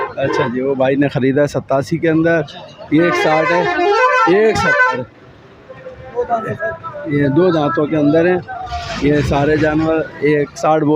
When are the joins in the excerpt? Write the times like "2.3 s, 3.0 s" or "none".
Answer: none